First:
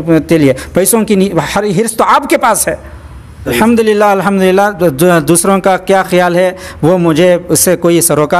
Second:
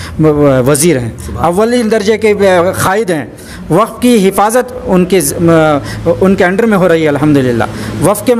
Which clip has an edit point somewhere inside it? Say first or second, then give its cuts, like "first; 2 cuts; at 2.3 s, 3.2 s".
first; 1 cut; at 3.5 s